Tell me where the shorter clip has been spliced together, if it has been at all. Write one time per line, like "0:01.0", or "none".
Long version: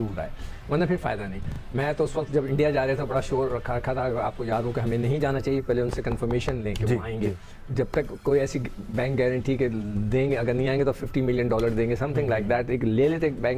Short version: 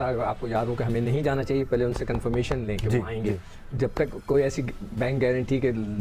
none